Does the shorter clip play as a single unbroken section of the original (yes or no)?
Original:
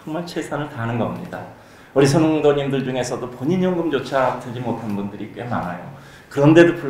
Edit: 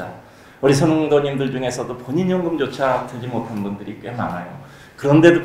yes